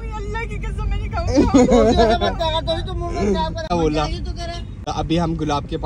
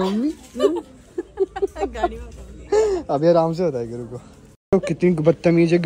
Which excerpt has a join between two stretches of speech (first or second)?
second